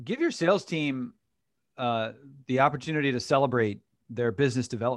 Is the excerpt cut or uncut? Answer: uncut